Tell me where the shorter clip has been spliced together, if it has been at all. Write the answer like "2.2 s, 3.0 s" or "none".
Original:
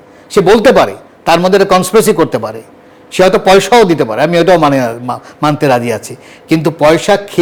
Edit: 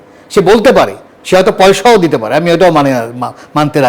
1.1 s